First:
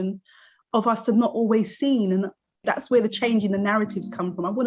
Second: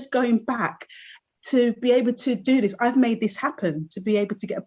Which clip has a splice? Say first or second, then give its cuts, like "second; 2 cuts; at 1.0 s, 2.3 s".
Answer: first; 1 cut; at 2.6 s